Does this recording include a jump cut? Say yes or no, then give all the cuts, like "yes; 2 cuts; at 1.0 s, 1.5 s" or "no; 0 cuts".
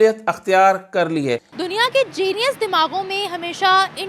yes; 1 cut; at 1.5 s